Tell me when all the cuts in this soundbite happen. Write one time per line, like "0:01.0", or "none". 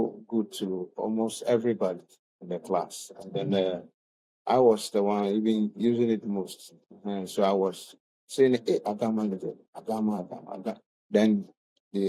none

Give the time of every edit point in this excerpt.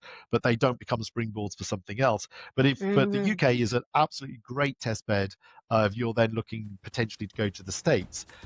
none

